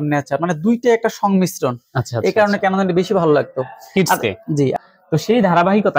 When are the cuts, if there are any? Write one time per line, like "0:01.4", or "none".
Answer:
0:04.8